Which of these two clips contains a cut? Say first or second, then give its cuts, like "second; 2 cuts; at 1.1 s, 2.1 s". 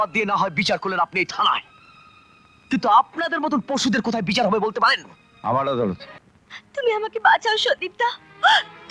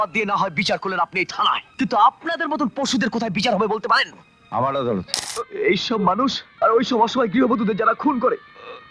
second; 3 cuts; at 1.7 s, 5.2 s, 6.4 s